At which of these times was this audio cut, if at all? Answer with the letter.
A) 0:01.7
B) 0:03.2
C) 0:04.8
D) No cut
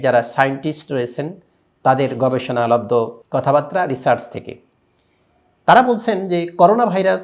B